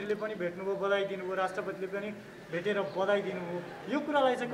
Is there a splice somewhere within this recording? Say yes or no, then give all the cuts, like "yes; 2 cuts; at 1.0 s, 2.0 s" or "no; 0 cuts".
no; 0 cuts